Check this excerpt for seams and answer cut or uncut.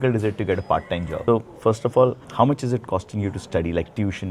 cut